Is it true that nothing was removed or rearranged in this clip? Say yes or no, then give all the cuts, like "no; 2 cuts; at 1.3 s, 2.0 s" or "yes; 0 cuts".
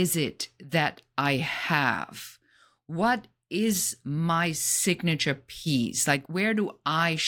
no; 1 cut; at 6.3 s